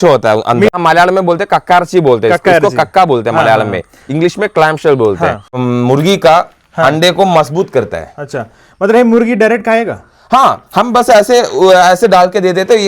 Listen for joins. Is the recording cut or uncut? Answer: cut